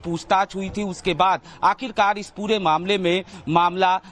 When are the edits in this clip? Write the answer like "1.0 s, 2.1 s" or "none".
2.3 s